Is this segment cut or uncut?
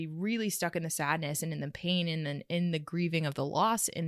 uncut